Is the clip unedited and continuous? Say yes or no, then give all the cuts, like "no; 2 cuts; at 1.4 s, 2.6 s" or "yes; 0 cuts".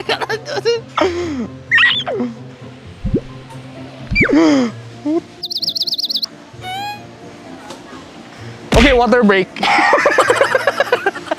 yes; 0 cuts